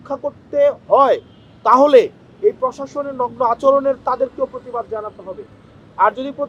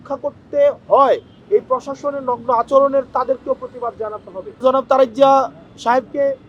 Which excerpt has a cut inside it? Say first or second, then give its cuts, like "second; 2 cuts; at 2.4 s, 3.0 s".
second; 2 cuts; at 1.3 s, 4.6 s